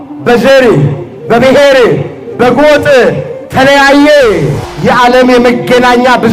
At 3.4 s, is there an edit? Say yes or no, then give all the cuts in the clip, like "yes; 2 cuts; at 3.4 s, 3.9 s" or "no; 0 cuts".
no; 1 cut; at 4.6 s